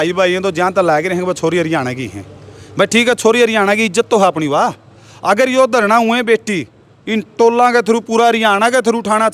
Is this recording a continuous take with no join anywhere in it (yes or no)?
yes